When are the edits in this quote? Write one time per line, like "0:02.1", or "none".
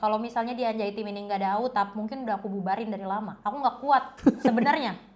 0:03.3
0:04.1

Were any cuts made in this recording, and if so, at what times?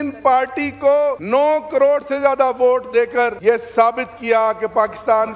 0:01.2
0:03.4

